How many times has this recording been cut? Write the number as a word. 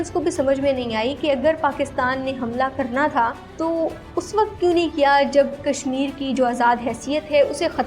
one